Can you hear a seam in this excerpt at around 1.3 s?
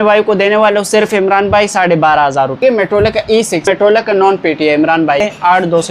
no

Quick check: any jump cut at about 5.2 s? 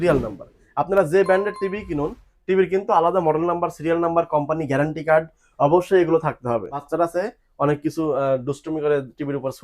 no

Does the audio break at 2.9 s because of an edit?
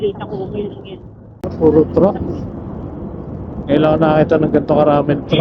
no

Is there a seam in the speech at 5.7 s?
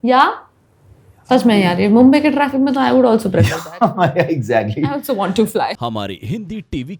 yes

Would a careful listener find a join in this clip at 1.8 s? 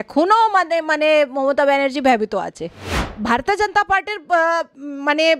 no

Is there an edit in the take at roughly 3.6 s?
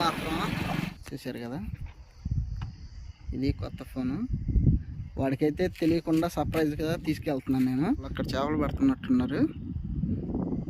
no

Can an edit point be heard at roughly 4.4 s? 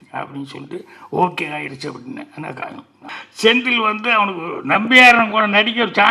no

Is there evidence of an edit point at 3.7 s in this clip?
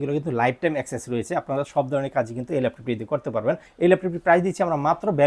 yes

